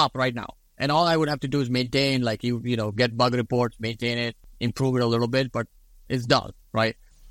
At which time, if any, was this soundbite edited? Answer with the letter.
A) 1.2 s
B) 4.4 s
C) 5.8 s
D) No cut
B